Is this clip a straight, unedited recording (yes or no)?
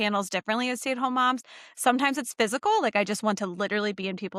yes